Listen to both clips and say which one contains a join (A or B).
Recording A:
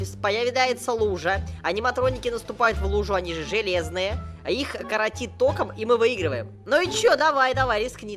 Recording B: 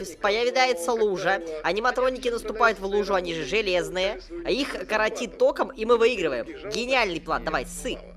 A